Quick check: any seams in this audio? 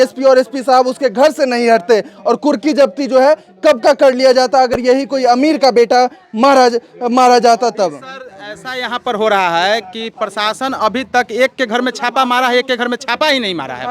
no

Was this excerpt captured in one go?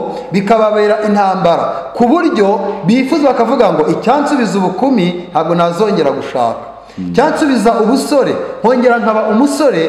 yes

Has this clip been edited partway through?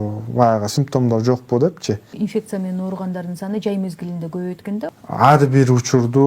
yes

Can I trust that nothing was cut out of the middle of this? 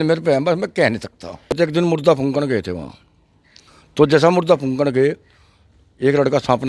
no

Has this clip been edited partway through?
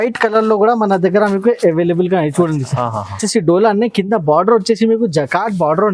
yes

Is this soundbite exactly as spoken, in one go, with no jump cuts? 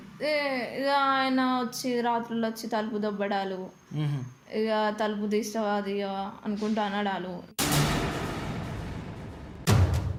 yes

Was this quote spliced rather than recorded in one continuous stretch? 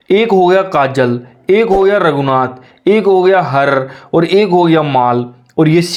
no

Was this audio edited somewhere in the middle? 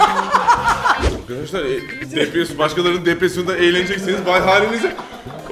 yes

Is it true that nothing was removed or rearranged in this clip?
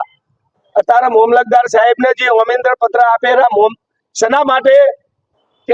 yes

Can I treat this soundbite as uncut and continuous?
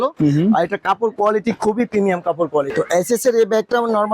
no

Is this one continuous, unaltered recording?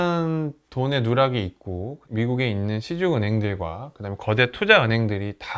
no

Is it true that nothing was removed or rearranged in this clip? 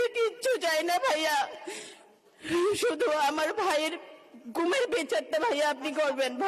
yes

